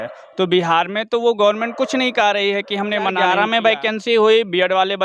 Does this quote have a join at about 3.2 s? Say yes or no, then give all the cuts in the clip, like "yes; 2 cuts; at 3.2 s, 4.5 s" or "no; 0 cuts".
yes; 1 cut; at 3.2 s